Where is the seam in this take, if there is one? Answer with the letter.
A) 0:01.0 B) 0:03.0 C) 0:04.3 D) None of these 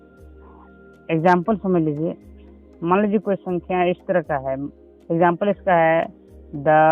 A